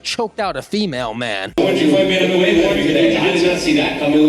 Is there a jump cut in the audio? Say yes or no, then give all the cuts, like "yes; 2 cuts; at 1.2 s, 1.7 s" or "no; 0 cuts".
yes; 1 cut; at 1.4 s